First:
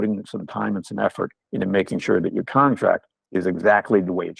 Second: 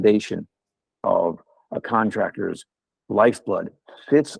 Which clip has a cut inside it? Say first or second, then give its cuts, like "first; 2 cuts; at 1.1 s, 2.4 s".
first; 1 cut; at 3.2 s